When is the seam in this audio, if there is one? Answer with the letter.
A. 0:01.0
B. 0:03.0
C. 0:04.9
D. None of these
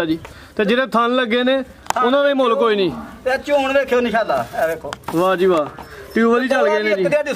D